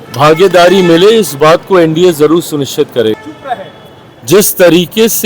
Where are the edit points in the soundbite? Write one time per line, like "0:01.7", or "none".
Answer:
0:03.3